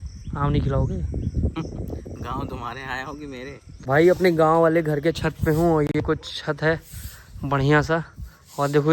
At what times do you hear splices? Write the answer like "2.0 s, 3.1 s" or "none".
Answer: 3.7 s